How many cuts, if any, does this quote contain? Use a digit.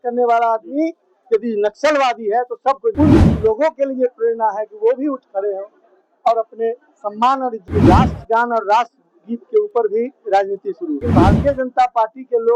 3